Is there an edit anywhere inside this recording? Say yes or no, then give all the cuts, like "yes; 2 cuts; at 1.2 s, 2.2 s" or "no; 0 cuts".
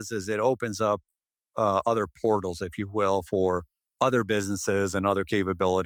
no; 0 cuts